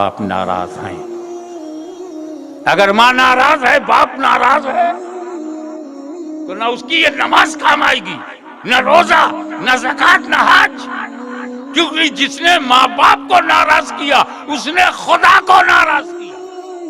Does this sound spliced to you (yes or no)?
yes